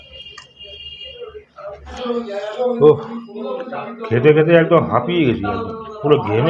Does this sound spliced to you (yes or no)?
yes